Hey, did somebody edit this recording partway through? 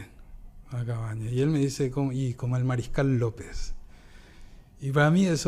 no; 0 cuts

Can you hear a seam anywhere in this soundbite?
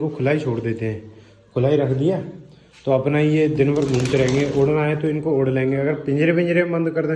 no; 0 cuts

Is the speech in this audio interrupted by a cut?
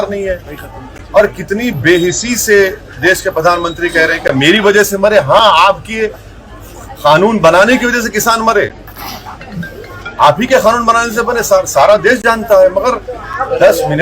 no; 0 cuts

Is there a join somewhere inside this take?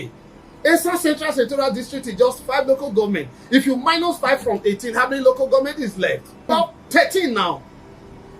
yes; 1 cut; at 6.3 s

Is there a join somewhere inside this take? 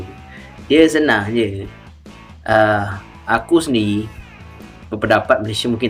no; 0 cuts

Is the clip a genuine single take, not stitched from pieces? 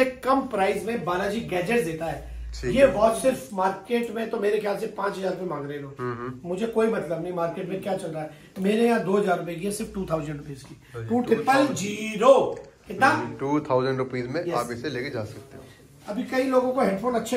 yes; 0 cuts

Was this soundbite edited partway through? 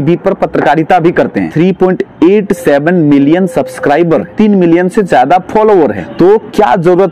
yes; 3 cuts; at 1.4 s, 4.3 s, 6.0 s

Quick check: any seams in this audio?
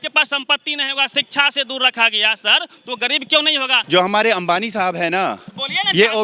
yes; 1 cut; at 3.7 s

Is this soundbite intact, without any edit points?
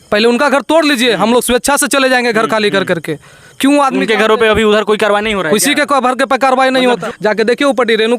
no; 1 cut; at 7.0 s

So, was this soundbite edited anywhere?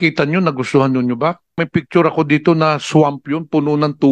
yes; 1 cut; at 1.6 s

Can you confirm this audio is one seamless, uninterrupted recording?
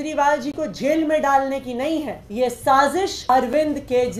no; 2 cuts; at 2.2 s, 3.2 s

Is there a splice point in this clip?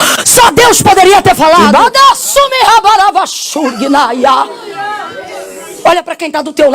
yes; 1 cut; at 1.6 s

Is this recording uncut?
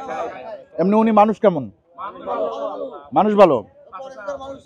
yes; 0 cuts

